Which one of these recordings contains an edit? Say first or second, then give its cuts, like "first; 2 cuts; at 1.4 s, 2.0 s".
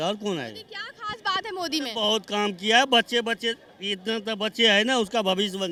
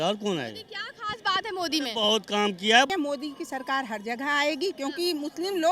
second; 1 cut; at 2.9 s